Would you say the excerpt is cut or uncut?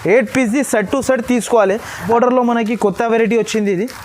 cut